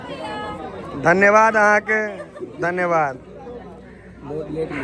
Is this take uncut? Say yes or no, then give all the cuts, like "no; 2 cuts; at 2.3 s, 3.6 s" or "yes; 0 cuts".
yes; 0 cuts